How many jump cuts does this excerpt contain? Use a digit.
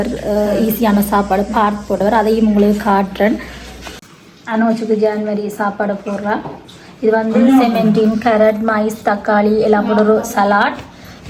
1